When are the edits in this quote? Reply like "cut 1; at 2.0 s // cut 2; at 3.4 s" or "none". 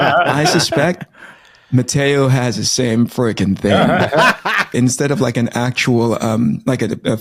cut 1; at 4.7 s